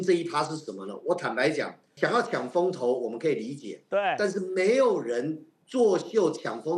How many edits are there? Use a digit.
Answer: 1